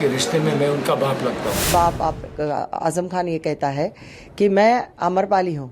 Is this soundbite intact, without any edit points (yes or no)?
no